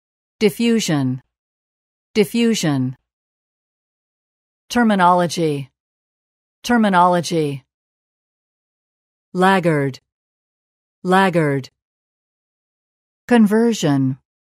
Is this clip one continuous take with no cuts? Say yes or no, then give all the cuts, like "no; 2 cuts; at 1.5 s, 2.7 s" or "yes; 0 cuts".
yes; 0 cuts